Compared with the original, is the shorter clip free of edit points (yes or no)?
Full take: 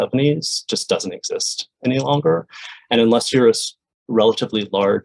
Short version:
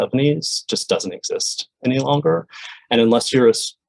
yes